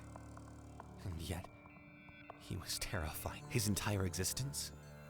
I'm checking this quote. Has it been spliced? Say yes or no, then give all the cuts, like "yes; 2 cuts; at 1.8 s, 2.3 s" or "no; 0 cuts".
yes; 1 cut; at 3.4 s